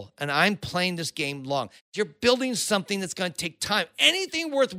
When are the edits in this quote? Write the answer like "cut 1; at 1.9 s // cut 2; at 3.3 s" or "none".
cut 1; at 1.9 s